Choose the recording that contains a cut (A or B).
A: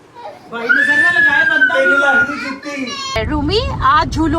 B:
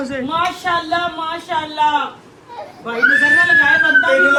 A